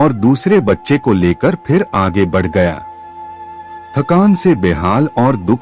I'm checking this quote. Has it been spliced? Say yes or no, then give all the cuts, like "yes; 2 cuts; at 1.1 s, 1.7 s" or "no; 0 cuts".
no; 0 cuts